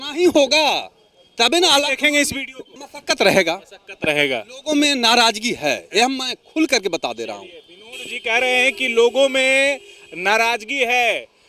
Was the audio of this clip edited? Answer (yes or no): no